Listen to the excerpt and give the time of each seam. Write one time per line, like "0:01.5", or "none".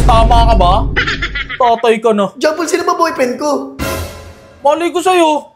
none